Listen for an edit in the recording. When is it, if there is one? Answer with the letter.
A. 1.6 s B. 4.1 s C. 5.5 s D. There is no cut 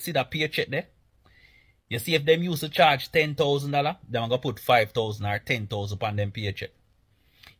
D